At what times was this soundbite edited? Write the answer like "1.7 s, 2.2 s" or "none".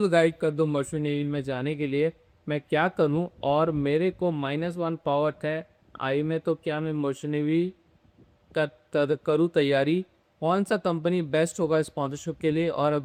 none